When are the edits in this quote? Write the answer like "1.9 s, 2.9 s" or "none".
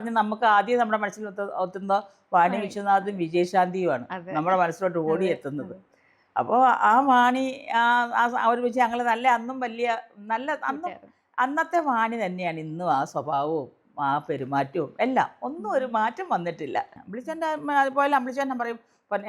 17.0 s